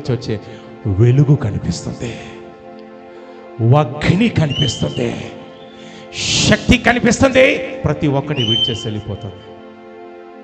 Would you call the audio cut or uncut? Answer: uncut